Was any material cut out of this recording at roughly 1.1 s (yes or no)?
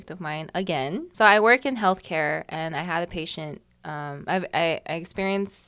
yes